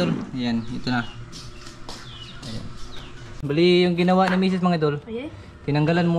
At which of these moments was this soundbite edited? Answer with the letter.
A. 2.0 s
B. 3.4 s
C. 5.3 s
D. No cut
B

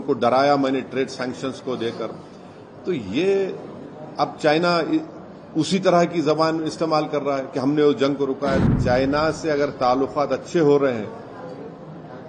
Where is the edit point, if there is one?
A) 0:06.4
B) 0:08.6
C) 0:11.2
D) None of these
B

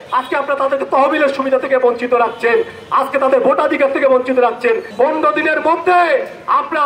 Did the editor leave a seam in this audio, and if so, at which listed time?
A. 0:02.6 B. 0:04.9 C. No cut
B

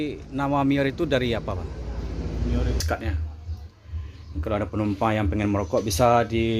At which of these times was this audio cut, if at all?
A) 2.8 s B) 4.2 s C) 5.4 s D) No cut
A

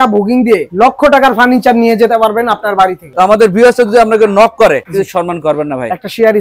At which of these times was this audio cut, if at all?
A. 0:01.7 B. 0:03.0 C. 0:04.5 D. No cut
B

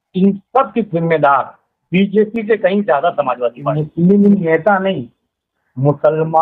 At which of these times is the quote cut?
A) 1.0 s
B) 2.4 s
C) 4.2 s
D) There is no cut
C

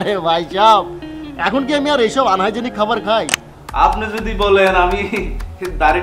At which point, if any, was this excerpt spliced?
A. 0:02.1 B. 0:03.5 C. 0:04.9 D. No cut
B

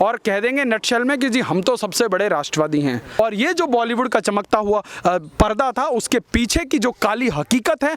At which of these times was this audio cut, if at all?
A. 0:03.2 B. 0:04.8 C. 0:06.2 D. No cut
A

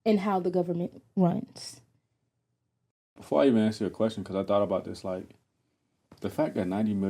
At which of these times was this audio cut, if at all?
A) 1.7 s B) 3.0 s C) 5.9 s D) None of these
B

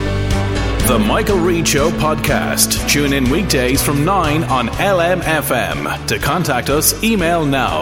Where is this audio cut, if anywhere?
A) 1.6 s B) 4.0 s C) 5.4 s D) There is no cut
D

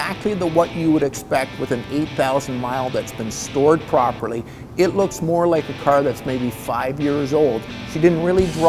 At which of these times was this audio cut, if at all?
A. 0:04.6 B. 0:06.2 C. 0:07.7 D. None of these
C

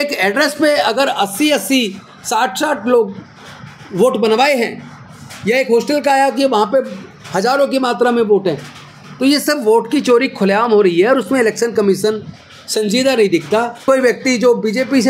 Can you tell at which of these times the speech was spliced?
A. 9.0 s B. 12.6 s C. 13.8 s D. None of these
C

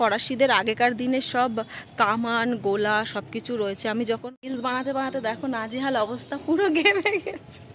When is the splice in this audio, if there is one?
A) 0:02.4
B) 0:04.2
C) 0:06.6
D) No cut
B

